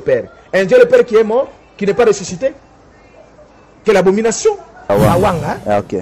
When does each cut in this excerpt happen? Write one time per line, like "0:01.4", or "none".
0:04.9